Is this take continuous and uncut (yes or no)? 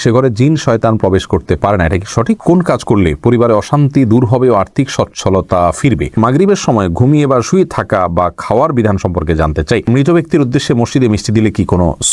no